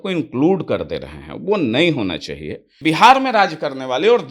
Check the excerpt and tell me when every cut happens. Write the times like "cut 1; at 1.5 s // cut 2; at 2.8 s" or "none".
cut 1; at 2.7 s